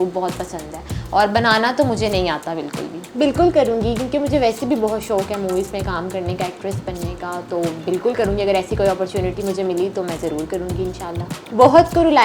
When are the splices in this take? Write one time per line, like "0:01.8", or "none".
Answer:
0:03.0
0:11.3